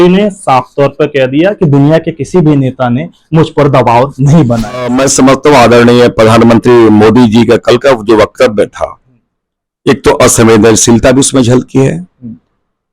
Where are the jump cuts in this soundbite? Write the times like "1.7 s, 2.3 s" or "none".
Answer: 4.9 s

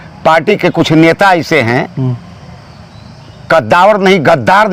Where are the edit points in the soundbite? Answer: none

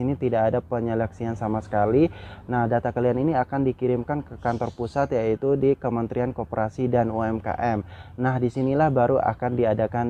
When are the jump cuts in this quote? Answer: none

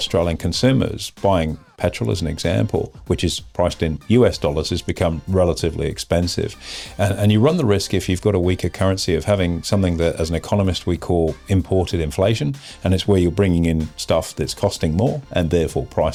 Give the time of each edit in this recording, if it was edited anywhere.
none

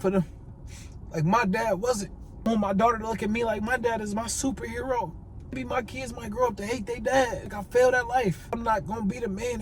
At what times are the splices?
2.5 s, 5.6 s, 7.4 s, 8.6 s

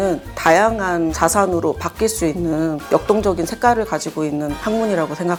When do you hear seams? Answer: none

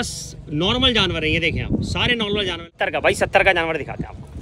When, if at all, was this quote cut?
2.8 s

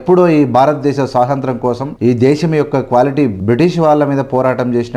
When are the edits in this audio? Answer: 1.9 s, 3.3 s

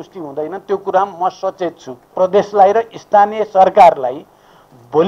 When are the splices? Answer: 2.1 s

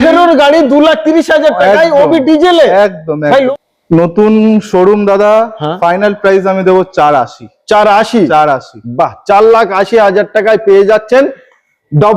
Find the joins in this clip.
3.5 s

